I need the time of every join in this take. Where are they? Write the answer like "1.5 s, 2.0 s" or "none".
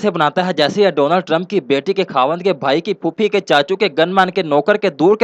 none